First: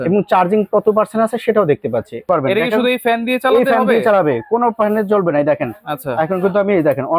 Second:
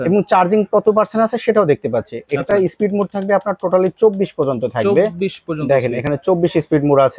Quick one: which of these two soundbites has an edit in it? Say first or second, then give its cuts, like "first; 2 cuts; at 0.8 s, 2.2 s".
first; 1 cut; at 2.3 s